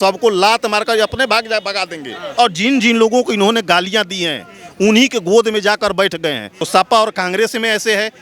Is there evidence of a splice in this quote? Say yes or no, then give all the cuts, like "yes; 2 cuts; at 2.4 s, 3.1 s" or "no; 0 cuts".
yes; 2 cuts; at 2.2 s, 6.5 s